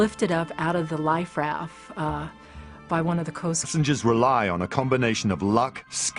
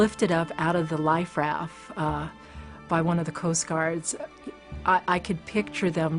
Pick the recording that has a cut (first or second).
second